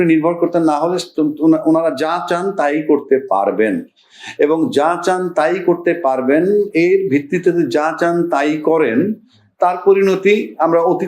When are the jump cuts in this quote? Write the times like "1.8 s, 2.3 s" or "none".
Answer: none